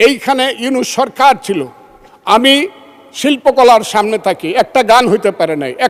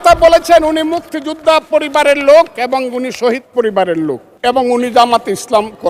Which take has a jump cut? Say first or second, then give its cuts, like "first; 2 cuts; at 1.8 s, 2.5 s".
second; 1 cut; at 4.3 s